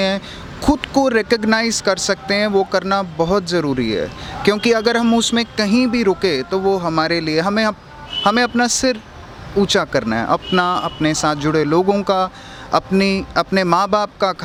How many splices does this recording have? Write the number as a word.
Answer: zero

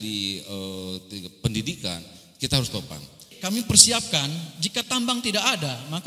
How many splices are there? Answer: one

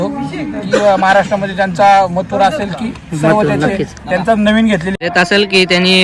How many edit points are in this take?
one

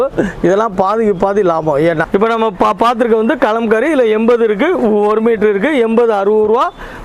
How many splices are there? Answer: one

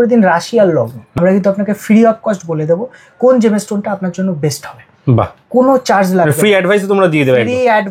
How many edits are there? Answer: one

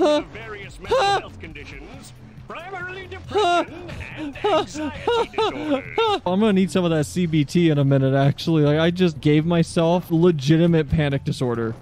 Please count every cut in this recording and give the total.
three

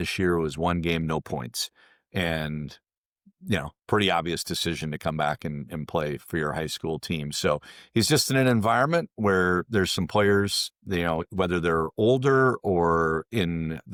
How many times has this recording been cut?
zero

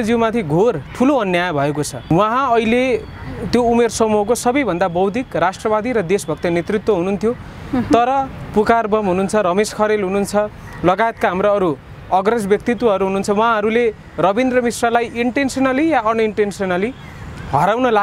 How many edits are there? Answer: zero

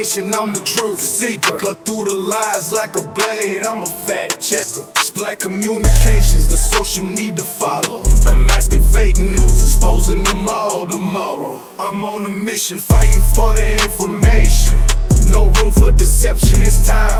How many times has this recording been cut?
zero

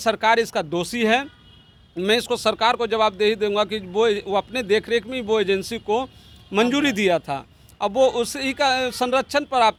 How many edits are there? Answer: zero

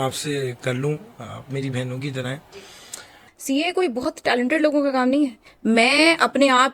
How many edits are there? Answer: one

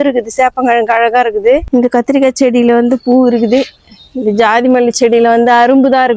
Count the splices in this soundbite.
one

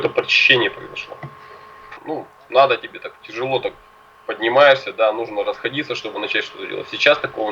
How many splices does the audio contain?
one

